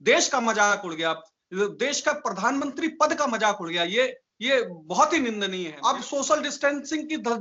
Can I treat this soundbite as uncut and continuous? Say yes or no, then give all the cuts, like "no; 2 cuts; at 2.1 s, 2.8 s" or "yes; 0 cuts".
no; 1 cut; at 5.7 s